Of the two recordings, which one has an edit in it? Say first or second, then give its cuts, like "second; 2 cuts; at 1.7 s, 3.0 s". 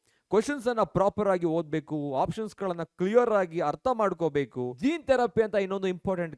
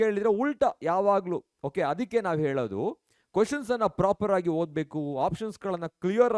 first; 1 cut; at 4.7 s